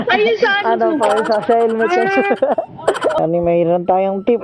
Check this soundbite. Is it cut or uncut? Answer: cut